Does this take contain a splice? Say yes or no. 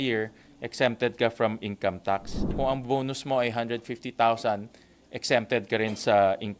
yes